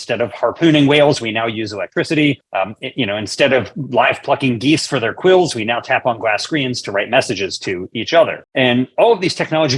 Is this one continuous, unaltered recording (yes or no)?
no